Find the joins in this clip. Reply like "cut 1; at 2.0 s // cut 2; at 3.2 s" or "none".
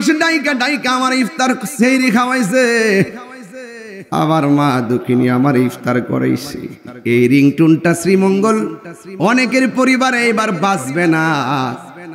none